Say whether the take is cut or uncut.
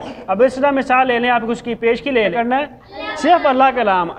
cut